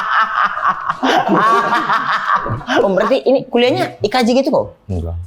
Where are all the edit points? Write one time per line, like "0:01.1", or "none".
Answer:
0:02.8